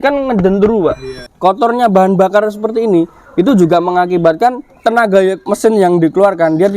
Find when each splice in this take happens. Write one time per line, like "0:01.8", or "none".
0:01.2
0:04.7
0:05.4

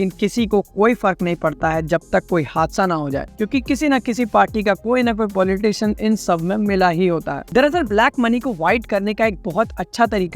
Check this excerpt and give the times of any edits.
0:03.2
0:07.4

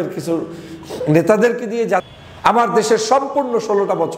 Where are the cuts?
0:02.0

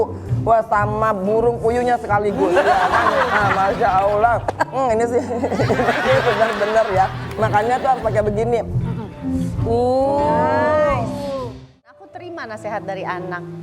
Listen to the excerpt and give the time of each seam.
0:11.9

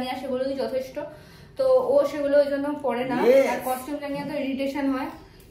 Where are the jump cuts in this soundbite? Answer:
none

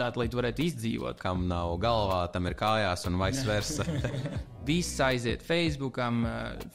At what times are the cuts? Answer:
0:01.2
0:04.5

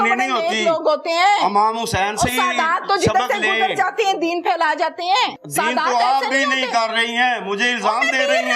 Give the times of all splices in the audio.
0:05.4

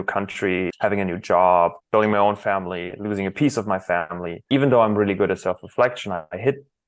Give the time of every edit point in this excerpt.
0:00.7
0:01.8
0:04.4

